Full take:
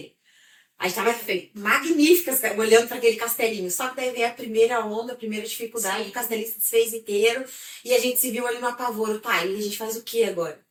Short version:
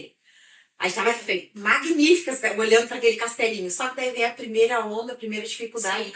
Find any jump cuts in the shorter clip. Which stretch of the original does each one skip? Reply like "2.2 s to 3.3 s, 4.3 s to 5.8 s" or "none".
none